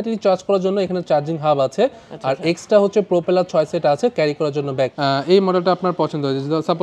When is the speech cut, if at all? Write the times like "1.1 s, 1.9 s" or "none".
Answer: 4.9 s